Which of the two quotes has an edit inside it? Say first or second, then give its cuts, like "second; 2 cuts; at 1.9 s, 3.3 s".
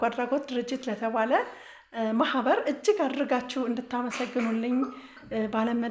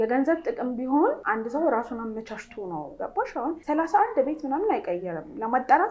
second; 3 cuts; at 1.2 s, 2.9 s, 3.6 s